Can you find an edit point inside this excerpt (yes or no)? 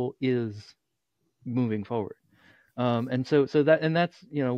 no